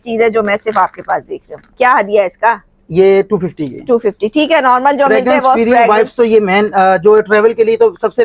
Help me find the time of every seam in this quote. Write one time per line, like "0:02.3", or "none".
none